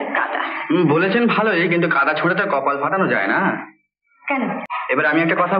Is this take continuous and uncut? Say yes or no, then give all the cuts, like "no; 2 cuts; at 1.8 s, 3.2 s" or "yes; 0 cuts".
no; 1 cut; at 4.7 s